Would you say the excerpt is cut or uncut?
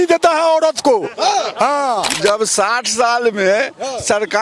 cut